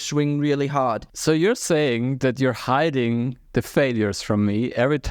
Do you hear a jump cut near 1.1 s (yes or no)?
yes